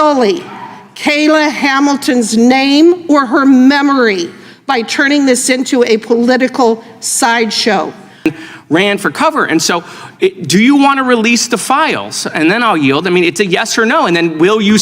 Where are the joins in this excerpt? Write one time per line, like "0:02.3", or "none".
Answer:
0:08.3